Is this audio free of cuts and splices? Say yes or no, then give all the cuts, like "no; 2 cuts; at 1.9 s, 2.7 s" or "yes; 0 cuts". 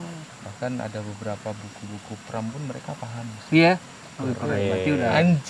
yes; 0 cuts